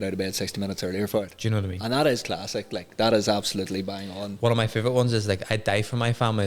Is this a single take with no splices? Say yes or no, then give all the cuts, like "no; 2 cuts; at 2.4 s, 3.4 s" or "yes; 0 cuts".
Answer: yes; 0 cuts